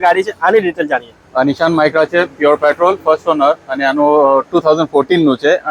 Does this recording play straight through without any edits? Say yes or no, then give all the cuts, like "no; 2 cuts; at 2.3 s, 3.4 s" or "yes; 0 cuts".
yes; 0 cuts